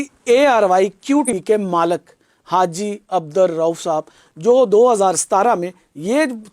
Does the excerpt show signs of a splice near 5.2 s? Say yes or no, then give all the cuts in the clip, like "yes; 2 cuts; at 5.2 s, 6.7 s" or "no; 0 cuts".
no; 1 cut; at 1.3 s